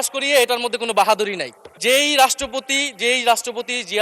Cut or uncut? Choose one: cut